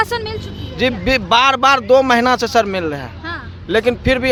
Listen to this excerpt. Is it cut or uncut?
uncut